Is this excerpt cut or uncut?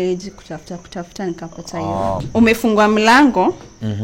cut